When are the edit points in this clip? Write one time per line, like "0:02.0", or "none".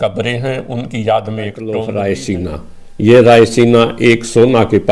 0:01.6